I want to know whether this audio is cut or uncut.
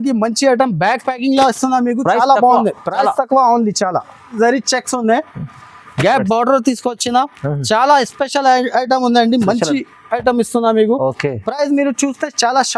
cut